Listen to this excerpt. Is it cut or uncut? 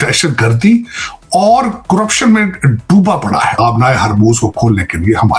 cut